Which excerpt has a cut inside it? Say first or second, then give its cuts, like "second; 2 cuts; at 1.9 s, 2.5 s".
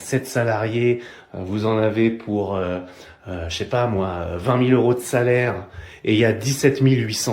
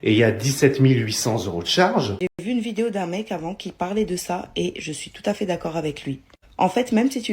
second; 1 cut; at 2.4 s